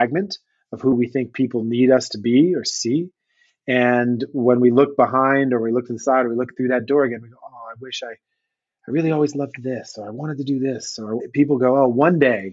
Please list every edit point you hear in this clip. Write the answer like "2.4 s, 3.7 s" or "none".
11.2 s